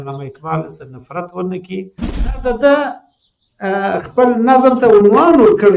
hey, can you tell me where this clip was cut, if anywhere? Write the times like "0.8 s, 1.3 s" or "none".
2.4 s